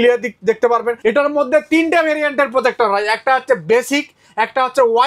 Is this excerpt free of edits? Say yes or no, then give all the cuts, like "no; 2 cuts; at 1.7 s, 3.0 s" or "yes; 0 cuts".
no; 1 cut; at 0.9 s